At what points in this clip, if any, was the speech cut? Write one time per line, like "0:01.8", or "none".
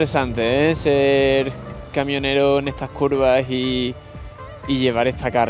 none